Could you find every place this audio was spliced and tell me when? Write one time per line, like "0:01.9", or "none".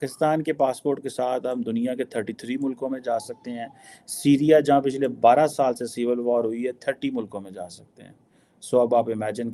none

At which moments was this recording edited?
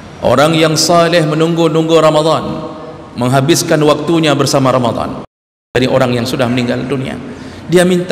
0:05.8

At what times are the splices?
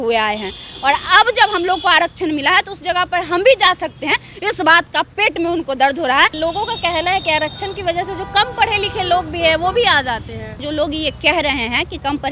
0:06.3
0:10.5

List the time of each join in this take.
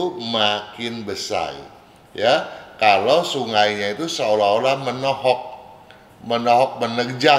none

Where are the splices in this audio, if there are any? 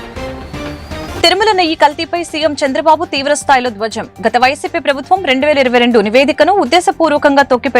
0:01.0

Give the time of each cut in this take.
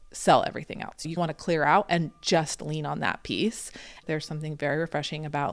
0:01.1
0:04.0

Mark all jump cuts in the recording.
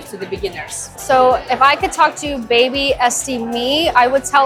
none

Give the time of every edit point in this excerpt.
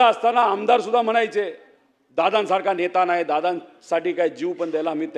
none

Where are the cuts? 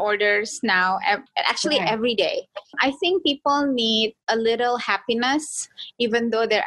0:01.3
0:02.7
0:04.2

